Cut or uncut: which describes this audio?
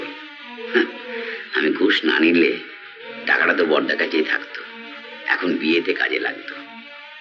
uncut